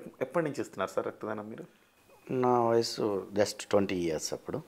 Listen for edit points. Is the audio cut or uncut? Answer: uncut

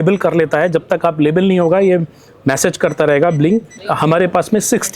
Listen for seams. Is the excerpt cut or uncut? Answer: cut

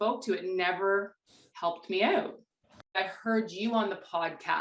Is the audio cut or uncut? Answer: cut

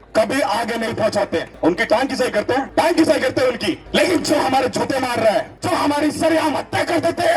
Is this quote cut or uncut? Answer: cut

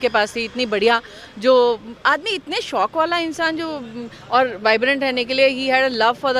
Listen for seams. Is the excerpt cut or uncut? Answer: uncut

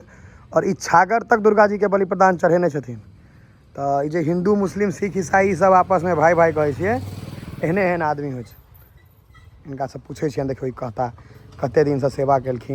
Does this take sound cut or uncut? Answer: uncut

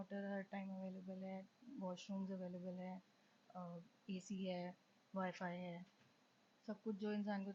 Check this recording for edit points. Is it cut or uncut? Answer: uncut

